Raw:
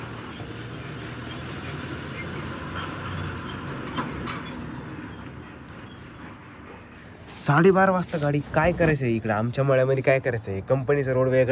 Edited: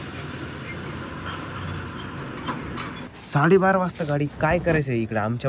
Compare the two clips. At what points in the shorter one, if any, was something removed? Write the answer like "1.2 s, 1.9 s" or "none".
3.1 s